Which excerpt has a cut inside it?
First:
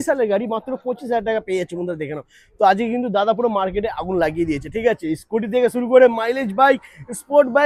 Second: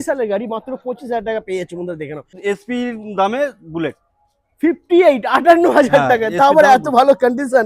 second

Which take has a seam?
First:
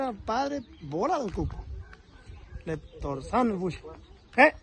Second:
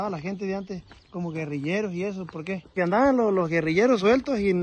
second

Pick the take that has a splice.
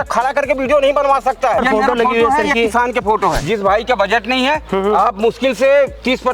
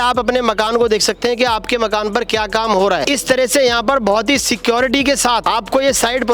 first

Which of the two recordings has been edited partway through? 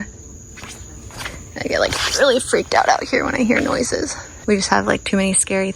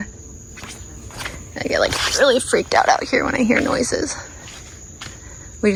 first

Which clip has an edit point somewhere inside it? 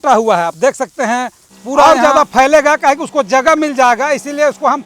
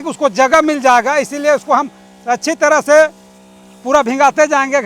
first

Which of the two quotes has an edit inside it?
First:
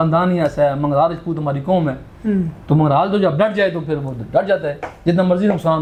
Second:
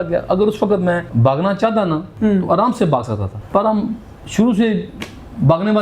second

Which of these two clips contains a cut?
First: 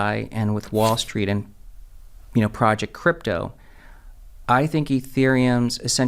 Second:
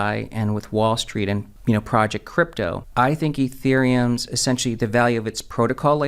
second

